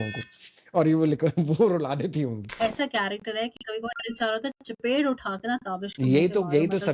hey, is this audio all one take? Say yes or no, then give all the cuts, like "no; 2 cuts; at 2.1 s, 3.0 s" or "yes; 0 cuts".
no; 1 cut; at 2.5 s